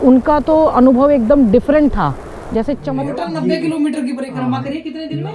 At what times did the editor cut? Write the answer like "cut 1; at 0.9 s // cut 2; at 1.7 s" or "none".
cut 1; at 2.9 s

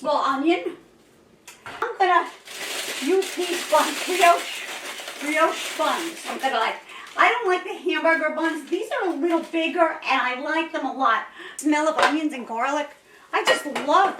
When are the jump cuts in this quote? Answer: cut 1; at 1.9 s // cut 2; at 11.5 s

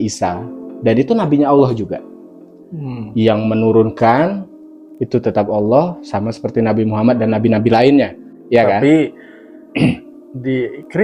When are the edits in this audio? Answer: none

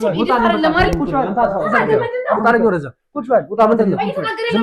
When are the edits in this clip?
none

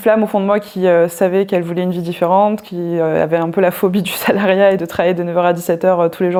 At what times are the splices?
none

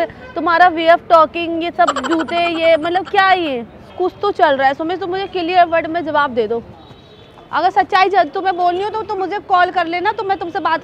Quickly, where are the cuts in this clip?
cut 1; at 3.9 s // cut 2; at 6.7 s

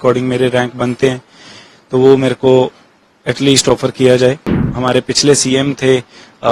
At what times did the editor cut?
cut 1; at 4.5 s

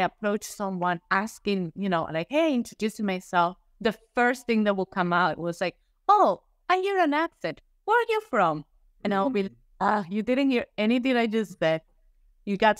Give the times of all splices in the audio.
none

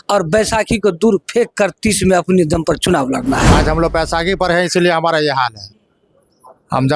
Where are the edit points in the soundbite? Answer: cut 1; at 3.5 s

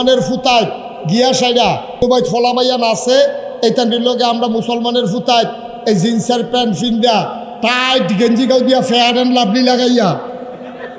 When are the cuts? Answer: cut 1; at 2.0 s

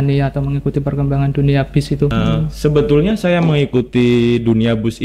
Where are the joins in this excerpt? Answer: cut 1; at 2.1 s

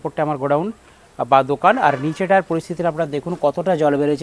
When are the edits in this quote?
none

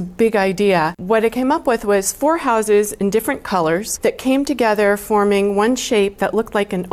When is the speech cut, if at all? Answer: cut 1; at 1.0 s // cut 2; at 3.9 s

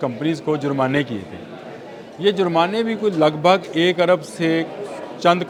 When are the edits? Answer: none

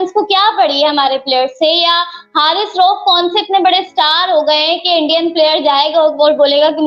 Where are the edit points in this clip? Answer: none

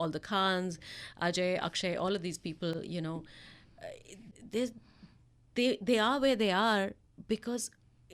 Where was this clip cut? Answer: none

